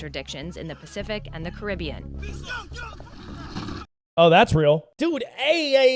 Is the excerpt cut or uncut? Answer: uncut